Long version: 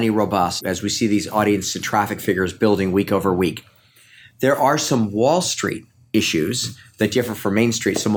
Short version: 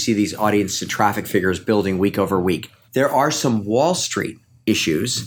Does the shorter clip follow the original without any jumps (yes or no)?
no